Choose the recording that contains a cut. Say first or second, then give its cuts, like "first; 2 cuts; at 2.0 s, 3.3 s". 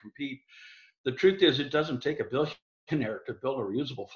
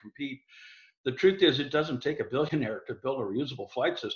second; 1 cut; at 2.5 s